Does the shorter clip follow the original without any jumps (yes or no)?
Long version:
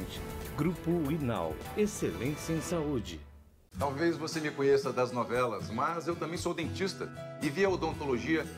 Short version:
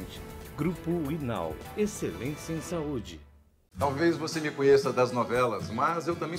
yes